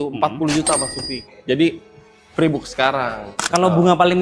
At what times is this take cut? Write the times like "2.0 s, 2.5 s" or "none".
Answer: 3.3 s